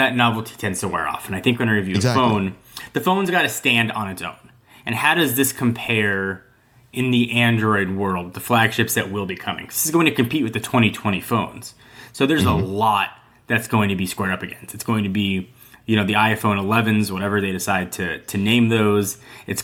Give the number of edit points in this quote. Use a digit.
0